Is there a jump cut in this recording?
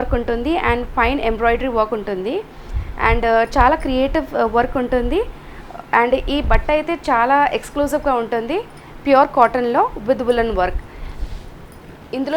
no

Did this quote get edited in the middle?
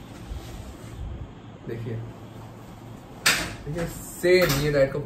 no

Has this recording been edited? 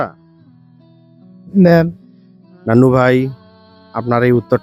no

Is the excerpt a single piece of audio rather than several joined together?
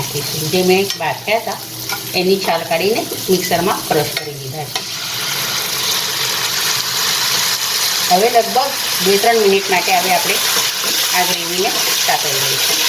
yes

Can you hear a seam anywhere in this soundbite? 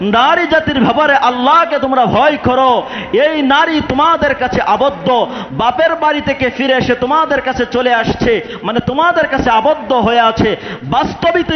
no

